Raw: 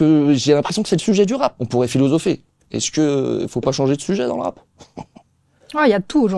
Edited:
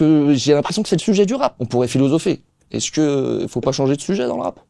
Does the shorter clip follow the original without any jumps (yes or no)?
yes